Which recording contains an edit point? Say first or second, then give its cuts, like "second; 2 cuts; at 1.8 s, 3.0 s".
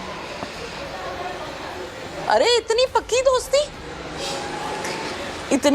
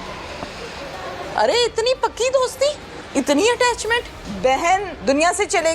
second; 4 cuts; at 1.2 s, 2.9 s, 4.2 s, 4.9 s